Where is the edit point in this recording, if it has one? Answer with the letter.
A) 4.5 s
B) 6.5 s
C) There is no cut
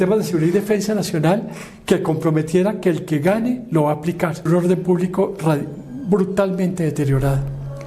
A